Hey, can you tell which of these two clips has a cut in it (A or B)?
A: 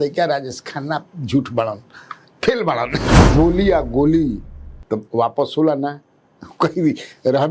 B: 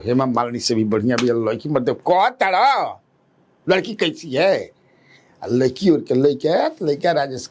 A